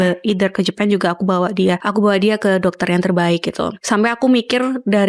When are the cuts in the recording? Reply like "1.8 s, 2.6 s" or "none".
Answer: 1.8 s, 3.7 s